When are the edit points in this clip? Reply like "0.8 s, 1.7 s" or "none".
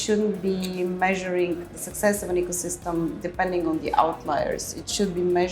none